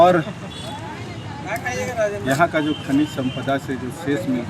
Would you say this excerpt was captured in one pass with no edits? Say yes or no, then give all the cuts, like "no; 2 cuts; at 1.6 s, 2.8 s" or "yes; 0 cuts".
yes; 0 cuts